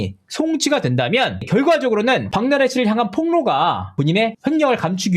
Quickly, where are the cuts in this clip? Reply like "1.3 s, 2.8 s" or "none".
2.3 s, 3.9 s

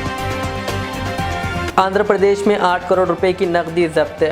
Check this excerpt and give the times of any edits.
1.7 s

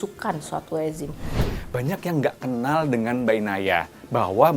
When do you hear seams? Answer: 1.4 s

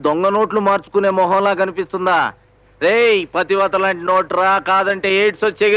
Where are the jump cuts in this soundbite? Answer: none

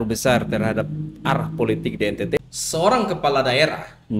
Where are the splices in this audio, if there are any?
2.4 s

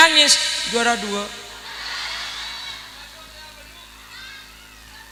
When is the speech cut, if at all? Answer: none

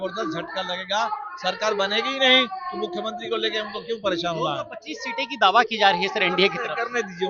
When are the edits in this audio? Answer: none

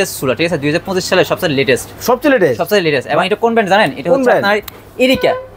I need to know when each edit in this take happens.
none

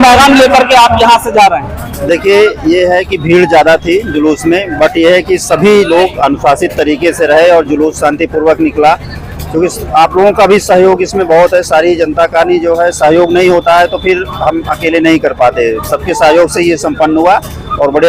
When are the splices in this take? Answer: none

